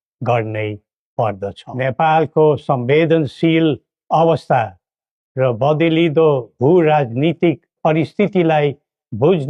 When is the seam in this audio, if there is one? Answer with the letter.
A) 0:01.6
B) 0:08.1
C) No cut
A